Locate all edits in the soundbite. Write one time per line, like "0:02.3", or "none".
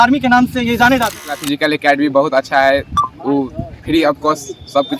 0:01.2